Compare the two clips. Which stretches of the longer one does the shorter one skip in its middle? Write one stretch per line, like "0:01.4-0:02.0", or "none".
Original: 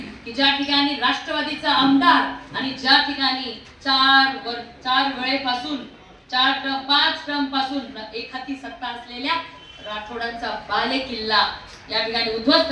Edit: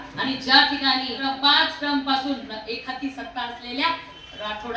0:03.5-0:06.6